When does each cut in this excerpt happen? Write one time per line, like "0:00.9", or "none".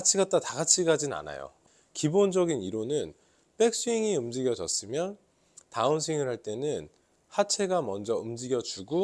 0:01.6